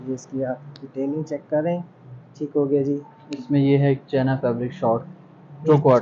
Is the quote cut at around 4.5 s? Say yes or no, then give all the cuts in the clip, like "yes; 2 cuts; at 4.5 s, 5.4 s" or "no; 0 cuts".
no; 0 cuts